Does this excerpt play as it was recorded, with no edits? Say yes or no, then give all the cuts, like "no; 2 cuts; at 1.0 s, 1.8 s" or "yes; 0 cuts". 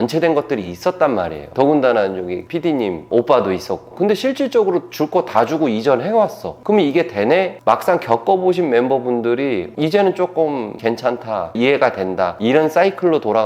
no; 2 cuts; at 3.9 s, 7.5 s